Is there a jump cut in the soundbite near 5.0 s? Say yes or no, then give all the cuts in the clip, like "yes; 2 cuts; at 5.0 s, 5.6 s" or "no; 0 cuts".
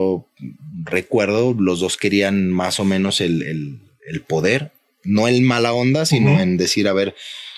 no; 0 cuts